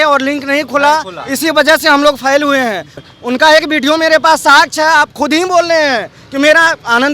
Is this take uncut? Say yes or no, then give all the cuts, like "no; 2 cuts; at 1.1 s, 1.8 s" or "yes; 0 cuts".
no; 1 cut; at 3.0 s